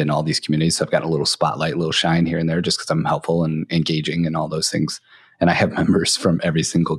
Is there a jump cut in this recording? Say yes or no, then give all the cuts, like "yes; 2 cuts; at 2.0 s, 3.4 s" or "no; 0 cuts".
no; 0 cuts